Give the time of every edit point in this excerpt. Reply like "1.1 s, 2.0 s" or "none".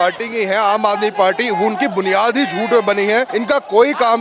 3.3 s